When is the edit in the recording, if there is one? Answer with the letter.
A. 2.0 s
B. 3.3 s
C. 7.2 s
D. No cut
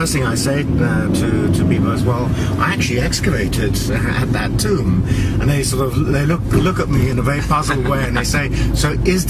D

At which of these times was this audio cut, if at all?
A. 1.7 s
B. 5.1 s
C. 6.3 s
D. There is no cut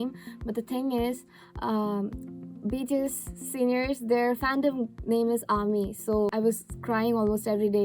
C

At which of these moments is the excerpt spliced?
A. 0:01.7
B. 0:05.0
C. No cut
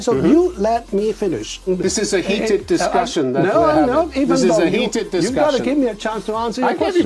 A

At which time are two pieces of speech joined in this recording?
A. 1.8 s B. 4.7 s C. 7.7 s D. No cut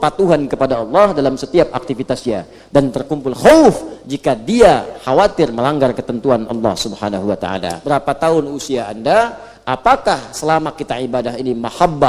C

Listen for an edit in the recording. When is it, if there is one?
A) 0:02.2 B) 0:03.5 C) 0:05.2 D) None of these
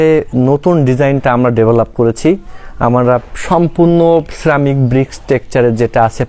D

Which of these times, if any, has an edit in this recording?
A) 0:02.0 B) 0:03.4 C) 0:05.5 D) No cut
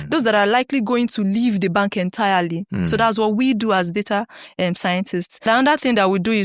C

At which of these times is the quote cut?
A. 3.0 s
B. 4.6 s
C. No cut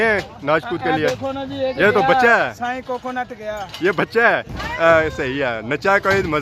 B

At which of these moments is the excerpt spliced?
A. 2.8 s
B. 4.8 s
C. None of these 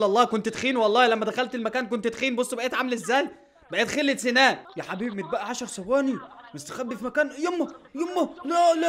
B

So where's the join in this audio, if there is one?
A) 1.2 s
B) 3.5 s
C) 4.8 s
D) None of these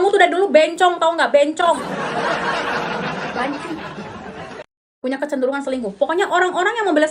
C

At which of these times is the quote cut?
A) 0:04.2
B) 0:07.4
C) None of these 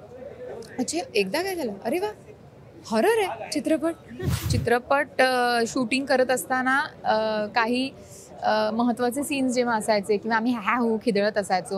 A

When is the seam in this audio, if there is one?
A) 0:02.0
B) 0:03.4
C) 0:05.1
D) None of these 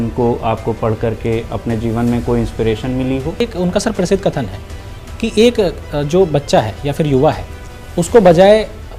B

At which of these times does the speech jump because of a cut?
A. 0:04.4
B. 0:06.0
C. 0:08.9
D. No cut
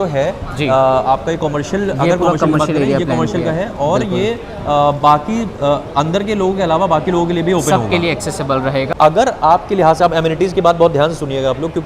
C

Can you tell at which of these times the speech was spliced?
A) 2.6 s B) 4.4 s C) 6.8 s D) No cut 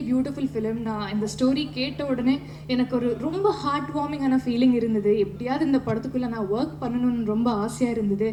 D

